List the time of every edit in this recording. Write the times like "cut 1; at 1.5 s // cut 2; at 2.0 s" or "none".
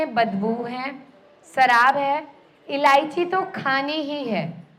none

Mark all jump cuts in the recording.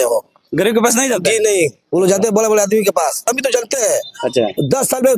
cut 1; at 3.3 s

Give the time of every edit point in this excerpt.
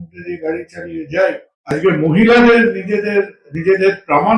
cut 1; at 1.7 s

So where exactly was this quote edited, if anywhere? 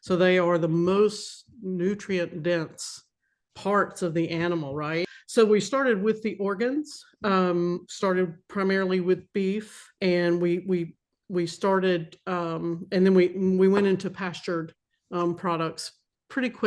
cut 1; at 5.1 s // cut 2; at 10.0 s

